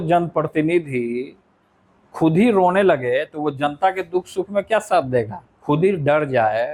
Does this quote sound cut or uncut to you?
uncut